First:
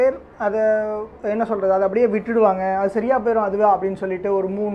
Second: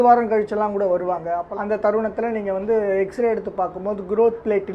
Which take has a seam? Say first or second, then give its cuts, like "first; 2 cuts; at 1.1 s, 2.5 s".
second; 1 cut; at 1.5 s